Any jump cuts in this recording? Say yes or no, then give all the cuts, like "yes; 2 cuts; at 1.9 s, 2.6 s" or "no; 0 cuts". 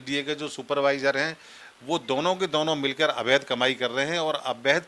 no; 0 cuts